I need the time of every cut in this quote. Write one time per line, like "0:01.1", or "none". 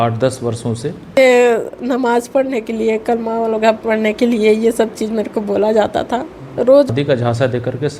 0:01.2
0:06.9